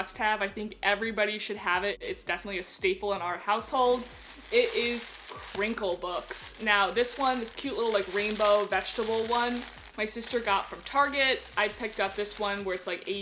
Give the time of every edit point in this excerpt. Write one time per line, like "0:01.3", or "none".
none